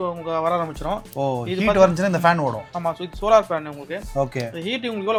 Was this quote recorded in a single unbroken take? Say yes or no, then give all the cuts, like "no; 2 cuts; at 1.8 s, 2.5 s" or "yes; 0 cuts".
yes; 0 cuts